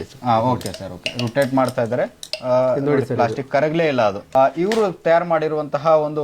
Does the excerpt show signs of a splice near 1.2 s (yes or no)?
no